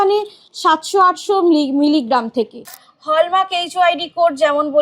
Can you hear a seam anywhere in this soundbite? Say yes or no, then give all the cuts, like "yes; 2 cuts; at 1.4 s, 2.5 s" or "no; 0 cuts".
yes; 1 cut; at 2.8 s